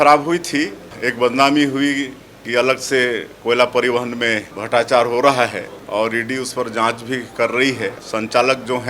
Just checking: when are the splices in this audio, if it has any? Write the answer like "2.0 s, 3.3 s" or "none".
1.0 s, 4.5 s, 5.7 s, 8.0 s